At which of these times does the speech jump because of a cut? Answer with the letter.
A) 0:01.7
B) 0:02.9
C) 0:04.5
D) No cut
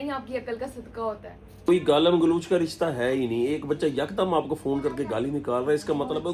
A